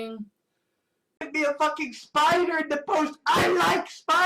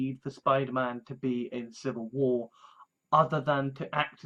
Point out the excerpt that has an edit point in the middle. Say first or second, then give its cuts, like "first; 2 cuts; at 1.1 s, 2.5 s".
first; 1 cut; at 1.2 s